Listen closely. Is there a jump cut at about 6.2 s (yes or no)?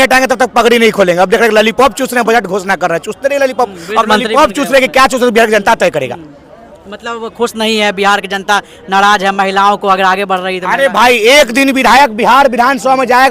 no